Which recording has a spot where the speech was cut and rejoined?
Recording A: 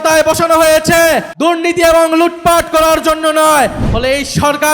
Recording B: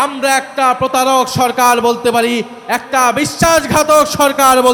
A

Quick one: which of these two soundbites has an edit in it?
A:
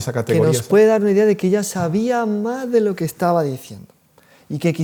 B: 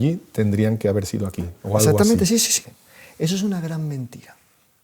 B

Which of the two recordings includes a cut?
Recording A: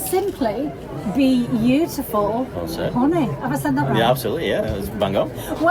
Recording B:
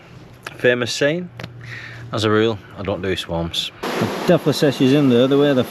B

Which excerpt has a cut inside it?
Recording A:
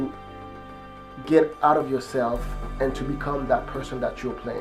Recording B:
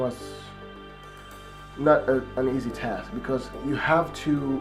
B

